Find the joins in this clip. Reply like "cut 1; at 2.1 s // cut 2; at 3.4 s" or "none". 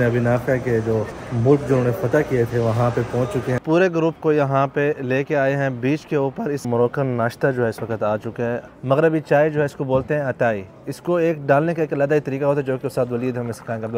cut 1; at 1.2 s // cut 2; at 3.6 s // cut 3; at 6.6 s // cut 4; at 8.7 s